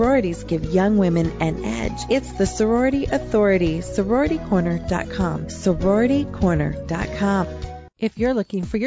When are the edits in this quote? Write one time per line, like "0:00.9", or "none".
0:07.8